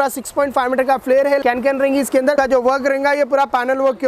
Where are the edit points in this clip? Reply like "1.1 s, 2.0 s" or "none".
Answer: 1.4 s, 2.4 s